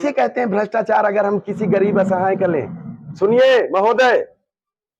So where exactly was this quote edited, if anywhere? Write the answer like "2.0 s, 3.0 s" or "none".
none